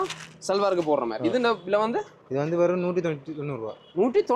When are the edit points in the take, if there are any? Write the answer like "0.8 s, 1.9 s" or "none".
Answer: none